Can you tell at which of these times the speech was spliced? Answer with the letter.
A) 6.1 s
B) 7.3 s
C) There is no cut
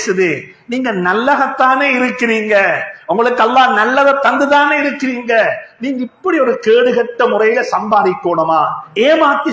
C